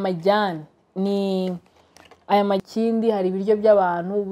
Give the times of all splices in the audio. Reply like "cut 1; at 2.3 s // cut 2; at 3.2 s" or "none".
cut 1; at 2.6 s